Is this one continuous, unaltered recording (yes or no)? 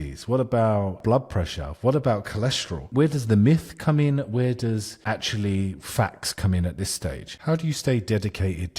no